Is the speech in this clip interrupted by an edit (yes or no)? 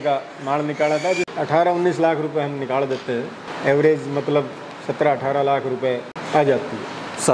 yes